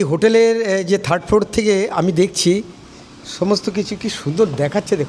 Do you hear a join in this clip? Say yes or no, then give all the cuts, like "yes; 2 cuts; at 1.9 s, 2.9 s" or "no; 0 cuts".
no; 0 cuts